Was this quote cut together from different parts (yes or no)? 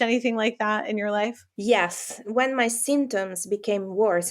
yes